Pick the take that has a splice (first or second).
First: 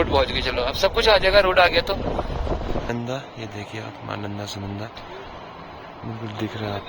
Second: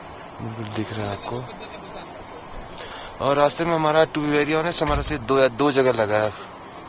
first